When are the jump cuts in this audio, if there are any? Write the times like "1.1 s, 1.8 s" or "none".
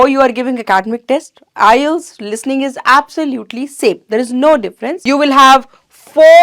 4.9 s